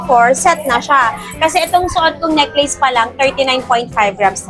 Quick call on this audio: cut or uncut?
uncut